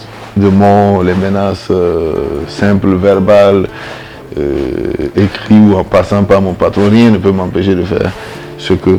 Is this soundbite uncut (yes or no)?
yes